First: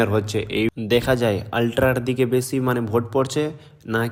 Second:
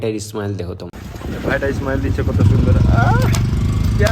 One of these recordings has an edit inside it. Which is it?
second; 1 cut; at 3.1 s

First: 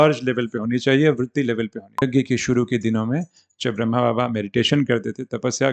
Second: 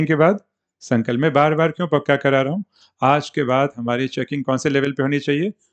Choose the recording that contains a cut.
first; 1 cut; at 2.0 s

